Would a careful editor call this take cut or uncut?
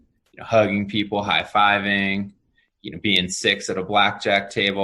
uncut